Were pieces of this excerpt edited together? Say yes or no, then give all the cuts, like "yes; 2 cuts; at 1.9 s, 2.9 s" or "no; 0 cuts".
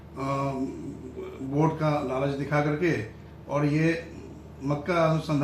no; 0 cuts